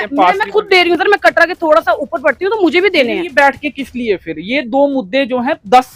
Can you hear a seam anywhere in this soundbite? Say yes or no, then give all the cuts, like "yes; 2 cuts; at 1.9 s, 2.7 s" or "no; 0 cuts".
no; 0 cuts